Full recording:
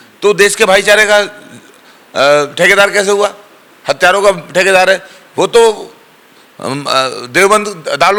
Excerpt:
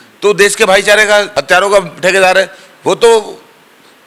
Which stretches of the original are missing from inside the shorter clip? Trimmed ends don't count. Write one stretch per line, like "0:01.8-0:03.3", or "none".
0:01.3-0:03.8